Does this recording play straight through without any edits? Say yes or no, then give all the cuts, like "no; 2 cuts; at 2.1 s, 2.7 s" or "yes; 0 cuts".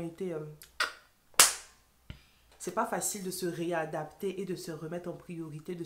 no; 1 cut; at 2.5 s